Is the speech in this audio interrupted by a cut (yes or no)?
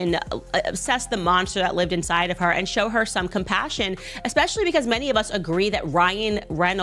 no